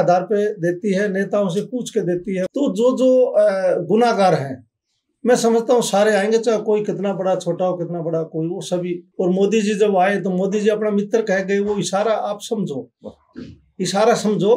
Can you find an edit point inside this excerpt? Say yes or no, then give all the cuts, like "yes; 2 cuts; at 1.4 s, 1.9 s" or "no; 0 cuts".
yes; 2 cuts; at 2.5 s, 9.0 s